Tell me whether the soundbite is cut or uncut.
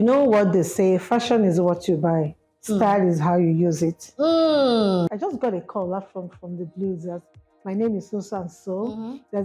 cut